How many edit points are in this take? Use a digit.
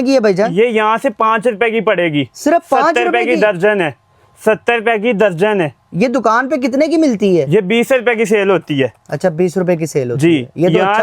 0